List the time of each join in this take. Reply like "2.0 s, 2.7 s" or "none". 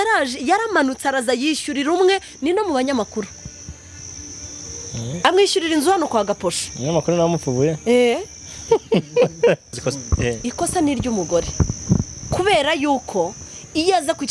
9.8 s